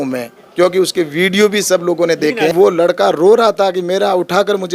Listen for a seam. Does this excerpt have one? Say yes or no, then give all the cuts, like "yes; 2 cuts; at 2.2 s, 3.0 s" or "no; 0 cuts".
yes; 1 cut; at 2.5 s